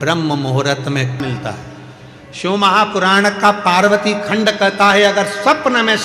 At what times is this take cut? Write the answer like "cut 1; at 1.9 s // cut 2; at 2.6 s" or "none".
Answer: cut 1; at 1.2 s